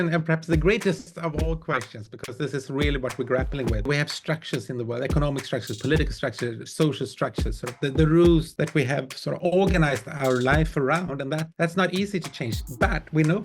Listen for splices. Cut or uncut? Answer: cut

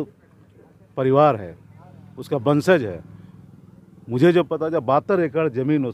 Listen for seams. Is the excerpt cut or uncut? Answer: uncut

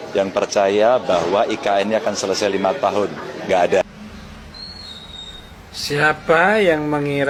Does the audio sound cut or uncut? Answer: uncut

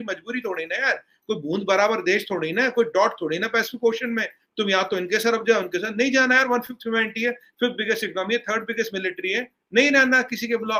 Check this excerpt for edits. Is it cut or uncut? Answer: uncut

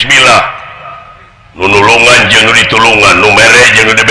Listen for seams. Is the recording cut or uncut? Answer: cut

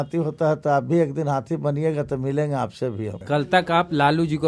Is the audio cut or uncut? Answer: cut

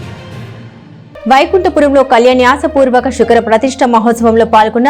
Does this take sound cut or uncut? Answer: cut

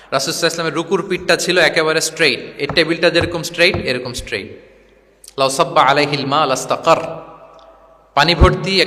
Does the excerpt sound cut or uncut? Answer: uncut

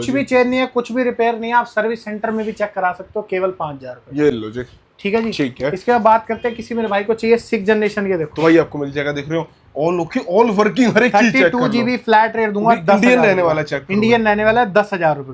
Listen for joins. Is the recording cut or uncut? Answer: uncut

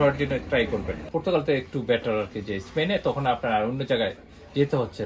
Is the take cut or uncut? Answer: cut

